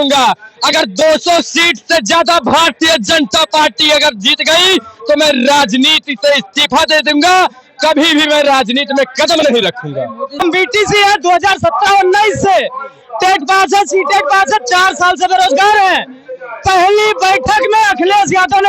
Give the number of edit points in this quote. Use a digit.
1